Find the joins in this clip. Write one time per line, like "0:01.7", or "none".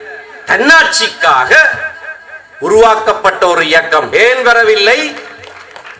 0:04.1